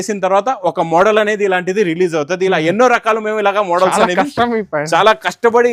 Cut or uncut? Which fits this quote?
uncut